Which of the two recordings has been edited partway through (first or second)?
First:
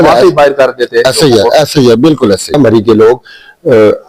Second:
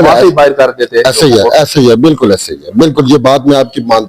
first